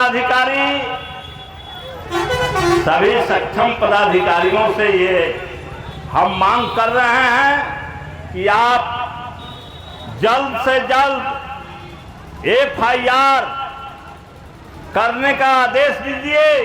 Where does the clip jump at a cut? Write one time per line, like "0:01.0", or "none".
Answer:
none